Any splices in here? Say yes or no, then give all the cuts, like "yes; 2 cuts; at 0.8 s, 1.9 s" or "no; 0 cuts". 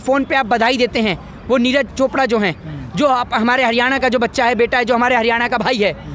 no; 0 cuts